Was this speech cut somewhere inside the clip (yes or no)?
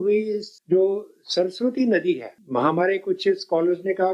no